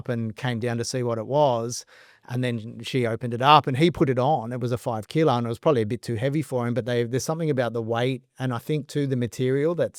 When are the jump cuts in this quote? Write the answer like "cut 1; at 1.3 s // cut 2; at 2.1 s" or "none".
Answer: none